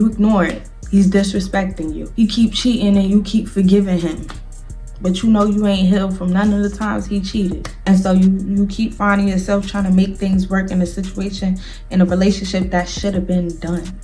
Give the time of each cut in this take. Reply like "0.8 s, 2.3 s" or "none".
none